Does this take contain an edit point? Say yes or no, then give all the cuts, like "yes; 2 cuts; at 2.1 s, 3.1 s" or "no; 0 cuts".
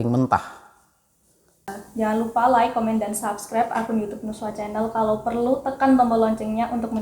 yes; 1 cut; at 1.7 s